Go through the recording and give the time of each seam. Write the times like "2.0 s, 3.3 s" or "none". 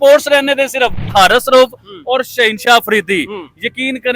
1.1 s